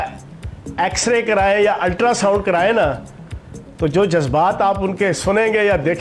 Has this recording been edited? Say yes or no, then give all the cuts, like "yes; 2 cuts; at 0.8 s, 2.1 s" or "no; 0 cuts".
no; 0 cuts